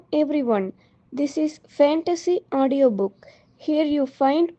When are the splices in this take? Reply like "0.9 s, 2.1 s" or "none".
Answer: none

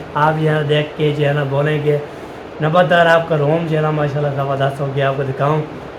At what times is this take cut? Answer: none

